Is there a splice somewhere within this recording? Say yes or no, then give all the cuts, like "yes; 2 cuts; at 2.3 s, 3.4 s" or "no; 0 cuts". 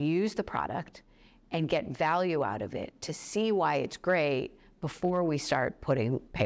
no; 0 cuts